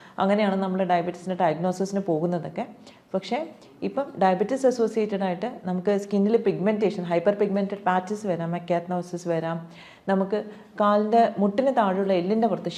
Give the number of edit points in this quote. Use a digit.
0